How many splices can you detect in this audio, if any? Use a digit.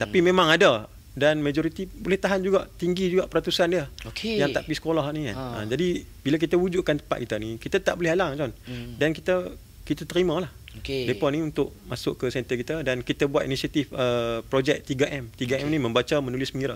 1